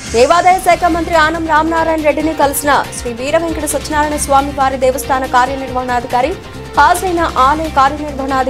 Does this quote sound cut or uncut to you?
uncut